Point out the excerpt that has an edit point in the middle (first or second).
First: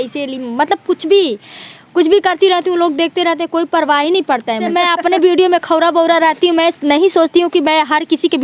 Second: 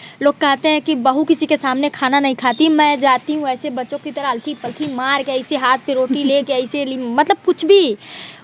first